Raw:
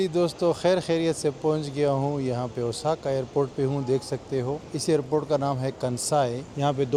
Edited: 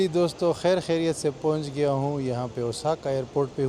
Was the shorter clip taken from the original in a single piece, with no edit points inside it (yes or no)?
yes